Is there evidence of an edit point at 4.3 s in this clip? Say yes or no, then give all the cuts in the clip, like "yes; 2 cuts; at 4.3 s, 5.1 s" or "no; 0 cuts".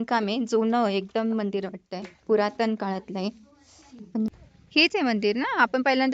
yes; 1 cut; at 4.3 s